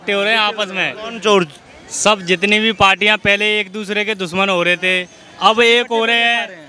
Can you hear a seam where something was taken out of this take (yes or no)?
no